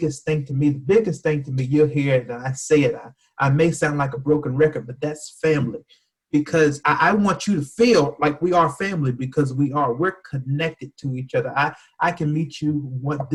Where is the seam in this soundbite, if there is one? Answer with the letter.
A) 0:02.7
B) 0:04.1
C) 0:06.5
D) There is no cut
D